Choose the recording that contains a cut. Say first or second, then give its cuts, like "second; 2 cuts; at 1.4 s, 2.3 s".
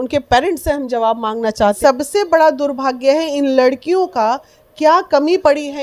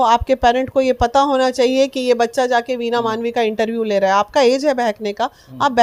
first; 1 cut; at 1.8 s